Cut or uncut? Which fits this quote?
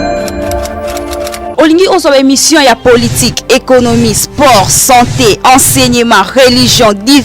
cut